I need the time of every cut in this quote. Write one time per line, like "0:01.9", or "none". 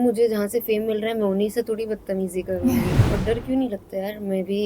0:03.0